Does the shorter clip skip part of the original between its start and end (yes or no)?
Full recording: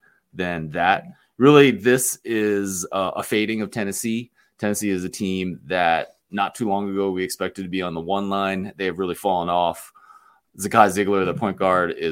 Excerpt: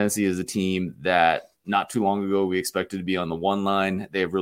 no